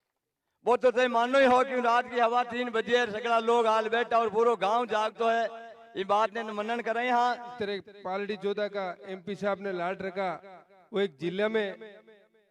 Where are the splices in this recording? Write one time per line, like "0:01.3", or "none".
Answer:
0:07.5

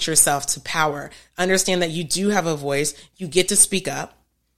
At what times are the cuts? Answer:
none

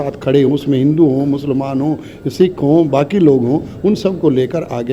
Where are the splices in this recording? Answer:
none

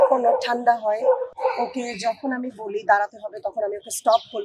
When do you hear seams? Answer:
0:01.3

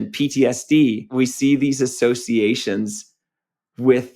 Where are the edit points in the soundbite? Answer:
0:01.1

